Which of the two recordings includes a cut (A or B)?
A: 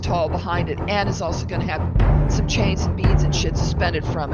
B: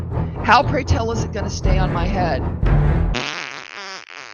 B